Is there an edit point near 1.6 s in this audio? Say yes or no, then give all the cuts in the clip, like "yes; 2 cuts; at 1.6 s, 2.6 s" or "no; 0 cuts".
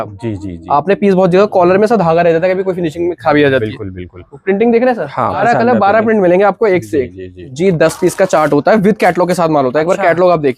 no; 3 cuts; at 4.3 s, 5.4 s, 7.4 s